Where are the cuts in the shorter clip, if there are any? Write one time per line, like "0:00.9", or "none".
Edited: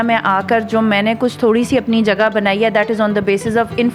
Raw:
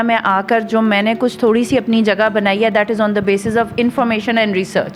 none